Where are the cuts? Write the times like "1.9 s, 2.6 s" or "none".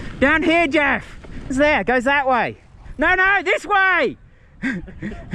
1.5 s